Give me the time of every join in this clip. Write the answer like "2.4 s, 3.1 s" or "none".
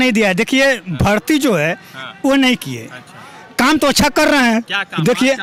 none